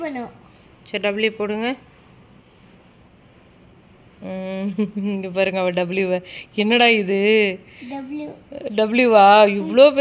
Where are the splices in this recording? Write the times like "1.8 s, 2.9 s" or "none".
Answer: none